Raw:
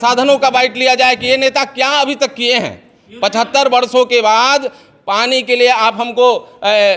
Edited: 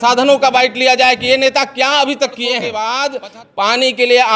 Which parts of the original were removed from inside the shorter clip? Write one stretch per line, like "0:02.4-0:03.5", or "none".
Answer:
0:02.7-0:04.2